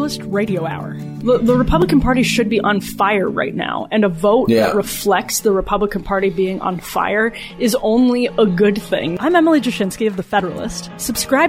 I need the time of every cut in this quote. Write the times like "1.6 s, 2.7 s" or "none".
1.2 s, 9.1 s